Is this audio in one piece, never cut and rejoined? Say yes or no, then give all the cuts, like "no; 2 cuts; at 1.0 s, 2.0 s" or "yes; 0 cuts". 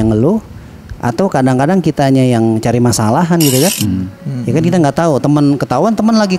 yes; 0 cuts